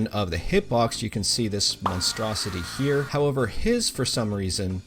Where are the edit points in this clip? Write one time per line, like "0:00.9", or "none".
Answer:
0:03.1